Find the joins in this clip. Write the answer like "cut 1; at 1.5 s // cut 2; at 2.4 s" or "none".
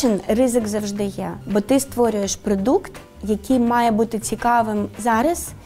cut 1; at 1.3 s